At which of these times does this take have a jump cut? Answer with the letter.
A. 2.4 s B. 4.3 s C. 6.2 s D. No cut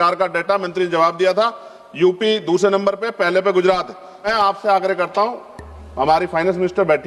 B